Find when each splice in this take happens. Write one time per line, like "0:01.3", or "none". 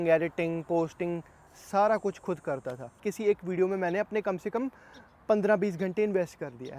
0:03.1